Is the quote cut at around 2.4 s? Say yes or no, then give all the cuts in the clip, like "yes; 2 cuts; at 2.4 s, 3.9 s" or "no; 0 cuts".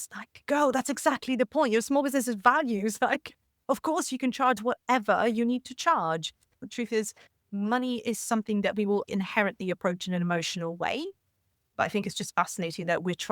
no; 3 cuts; at 6.5 s, 9.1 s, 11.7 s